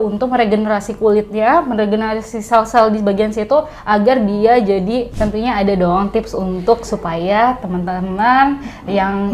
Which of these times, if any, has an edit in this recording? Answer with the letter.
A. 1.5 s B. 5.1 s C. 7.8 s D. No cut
B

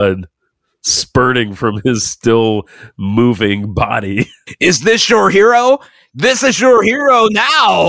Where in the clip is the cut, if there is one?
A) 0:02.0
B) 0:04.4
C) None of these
B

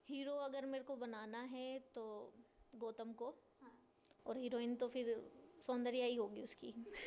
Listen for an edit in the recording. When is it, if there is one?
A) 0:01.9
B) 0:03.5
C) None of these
C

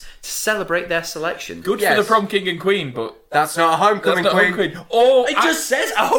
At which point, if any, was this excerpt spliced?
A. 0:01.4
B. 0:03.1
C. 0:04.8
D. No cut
D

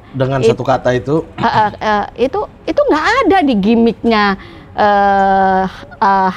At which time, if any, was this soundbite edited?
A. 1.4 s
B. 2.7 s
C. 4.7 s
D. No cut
D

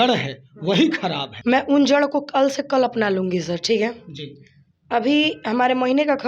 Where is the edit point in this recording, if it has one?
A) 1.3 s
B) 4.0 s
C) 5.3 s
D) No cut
A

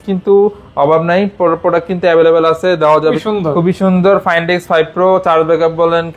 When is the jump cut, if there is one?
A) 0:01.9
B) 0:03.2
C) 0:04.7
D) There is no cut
B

